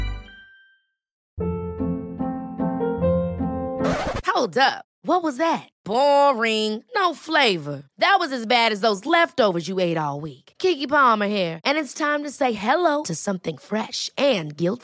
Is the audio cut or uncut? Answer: cut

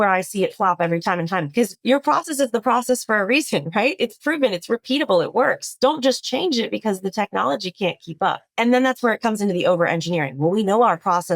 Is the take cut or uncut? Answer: cut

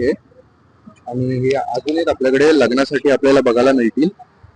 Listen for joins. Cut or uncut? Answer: uncut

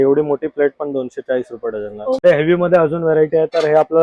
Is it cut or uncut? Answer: cut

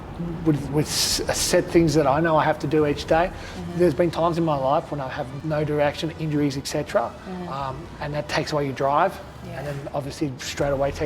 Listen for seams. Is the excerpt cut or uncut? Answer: cut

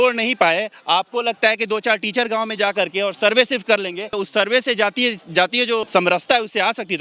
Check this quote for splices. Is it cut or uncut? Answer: cut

